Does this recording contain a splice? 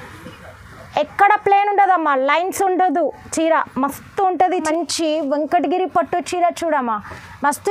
yes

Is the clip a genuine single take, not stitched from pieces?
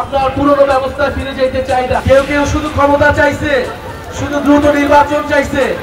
no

